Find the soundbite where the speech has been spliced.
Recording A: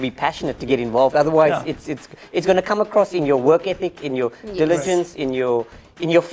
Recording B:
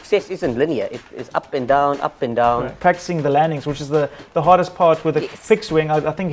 B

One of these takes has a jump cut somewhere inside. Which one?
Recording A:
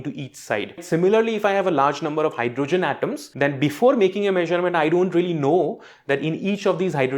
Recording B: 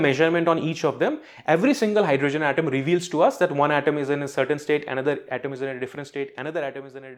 A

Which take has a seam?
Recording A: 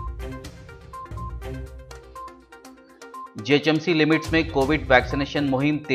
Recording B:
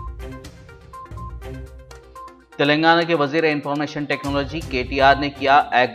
A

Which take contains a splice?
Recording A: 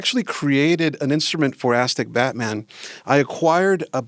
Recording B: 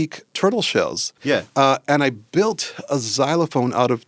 B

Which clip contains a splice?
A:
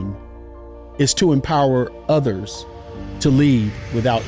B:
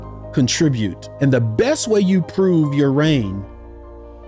B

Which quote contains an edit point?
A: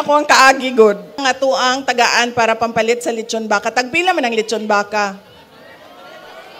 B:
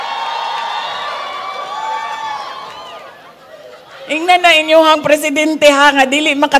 A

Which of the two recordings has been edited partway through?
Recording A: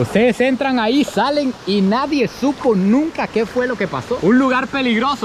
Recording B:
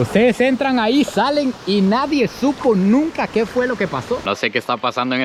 B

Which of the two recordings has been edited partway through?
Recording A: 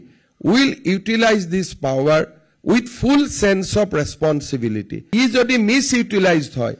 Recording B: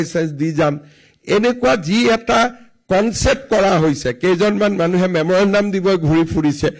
A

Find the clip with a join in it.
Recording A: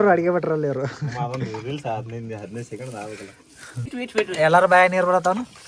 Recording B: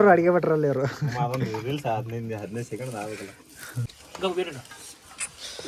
A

